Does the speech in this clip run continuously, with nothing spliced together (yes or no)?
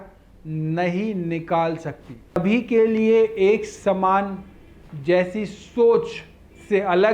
no